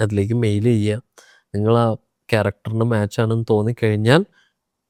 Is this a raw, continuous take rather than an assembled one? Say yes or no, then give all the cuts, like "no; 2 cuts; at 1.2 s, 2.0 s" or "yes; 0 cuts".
yes; 0 cuts